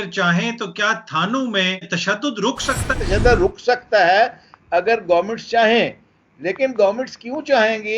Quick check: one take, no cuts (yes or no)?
no